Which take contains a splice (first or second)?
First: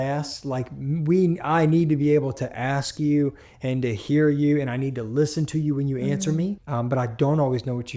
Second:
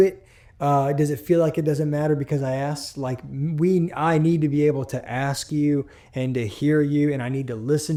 first